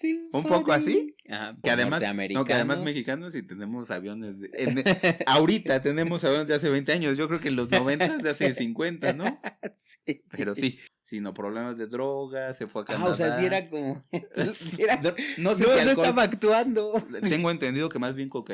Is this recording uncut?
no; 2 cuts; at 1.6 s, 10.9 s

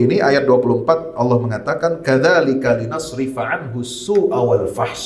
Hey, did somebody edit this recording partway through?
no; 0 cuts

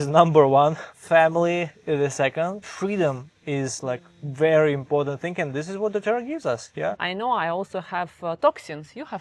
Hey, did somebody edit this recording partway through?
yes; 2 cuts; at 2.7 s, 7.0 s

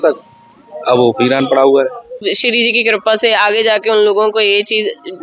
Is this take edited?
yes; 1 cut; at 2.2 s

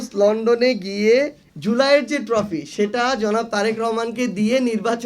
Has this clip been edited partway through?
yes; 1 cut; at 1.5 s

